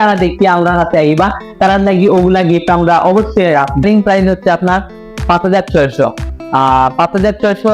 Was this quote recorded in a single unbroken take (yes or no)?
no